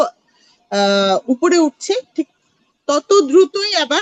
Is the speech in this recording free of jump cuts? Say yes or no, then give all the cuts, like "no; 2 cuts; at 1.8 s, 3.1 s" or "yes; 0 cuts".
yes; 0 cuts